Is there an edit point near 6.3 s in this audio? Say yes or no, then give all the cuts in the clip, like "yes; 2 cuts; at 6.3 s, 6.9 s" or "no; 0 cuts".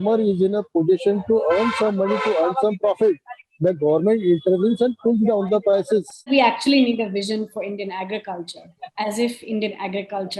yes; 1 cut; at 6.3 s